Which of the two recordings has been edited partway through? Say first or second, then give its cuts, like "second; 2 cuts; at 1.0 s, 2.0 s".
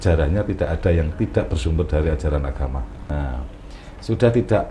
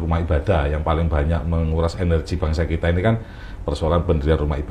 first; 1 cut; at 3.1 s